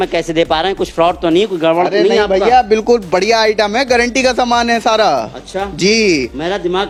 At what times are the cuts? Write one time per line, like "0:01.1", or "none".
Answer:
none